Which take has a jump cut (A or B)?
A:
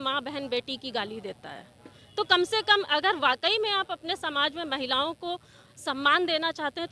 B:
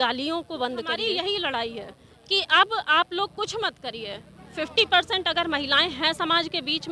B